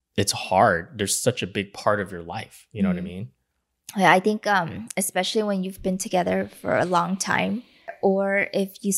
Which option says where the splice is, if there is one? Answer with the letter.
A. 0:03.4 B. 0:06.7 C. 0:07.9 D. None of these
C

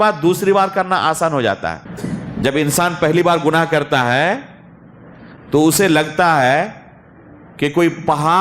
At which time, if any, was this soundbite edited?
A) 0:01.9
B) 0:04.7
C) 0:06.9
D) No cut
A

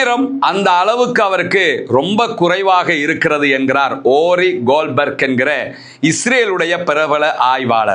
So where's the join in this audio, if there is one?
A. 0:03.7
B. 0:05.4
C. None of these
C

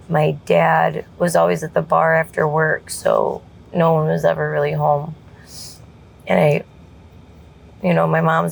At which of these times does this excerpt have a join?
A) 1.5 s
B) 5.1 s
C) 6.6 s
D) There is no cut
D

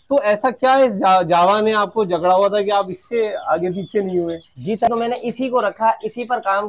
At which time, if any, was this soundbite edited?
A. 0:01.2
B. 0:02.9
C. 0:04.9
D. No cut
C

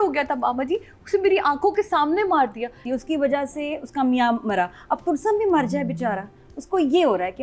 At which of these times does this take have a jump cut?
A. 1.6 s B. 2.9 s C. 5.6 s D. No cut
B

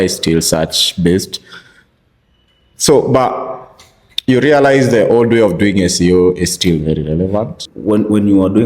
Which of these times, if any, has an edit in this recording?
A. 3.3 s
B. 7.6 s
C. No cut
B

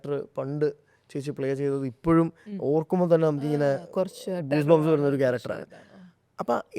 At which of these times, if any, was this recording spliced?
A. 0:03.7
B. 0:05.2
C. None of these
C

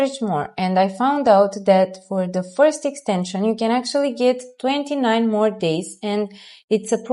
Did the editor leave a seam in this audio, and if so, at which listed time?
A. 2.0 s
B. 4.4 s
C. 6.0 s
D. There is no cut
D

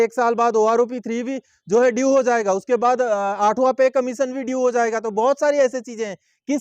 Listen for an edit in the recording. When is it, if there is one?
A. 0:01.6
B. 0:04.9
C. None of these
C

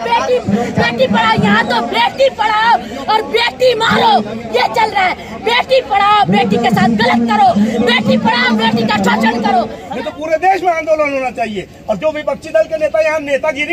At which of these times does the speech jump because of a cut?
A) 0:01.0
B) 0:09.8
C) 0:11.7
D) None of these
B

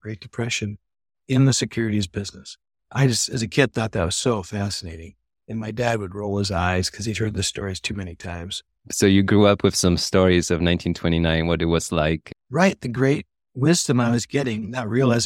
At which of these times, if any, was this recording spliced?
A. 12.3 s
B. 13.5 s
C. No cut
A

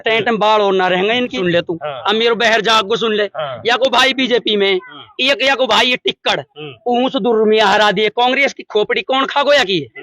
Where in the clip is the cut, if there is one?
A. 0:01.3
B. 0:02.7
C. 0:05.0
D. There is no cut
A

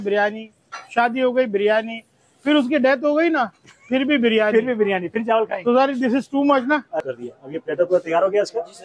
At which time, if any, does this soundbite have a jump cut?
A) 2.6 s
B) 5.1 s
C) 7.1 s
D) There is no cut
C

